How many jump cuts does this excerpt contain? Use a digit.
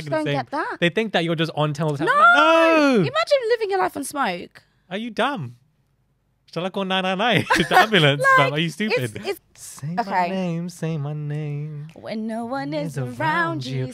1